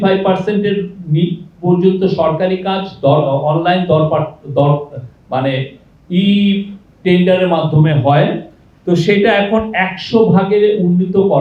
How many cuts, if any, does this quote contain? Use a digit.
0